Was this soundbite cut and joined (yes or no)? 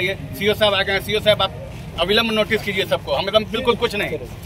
no